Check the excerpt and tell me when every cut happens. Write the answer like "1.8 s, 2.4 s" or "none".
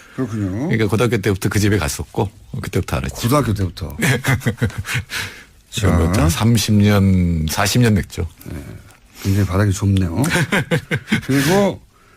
2.4 s